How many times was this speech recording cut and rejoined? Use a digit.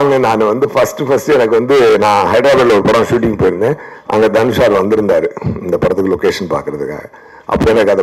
0